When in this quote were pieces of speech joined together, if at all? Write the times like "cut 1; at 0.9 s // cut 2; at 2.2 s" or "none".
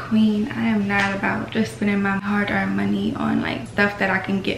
cut 1; at 2.2 s // cut 2; at 3.7 s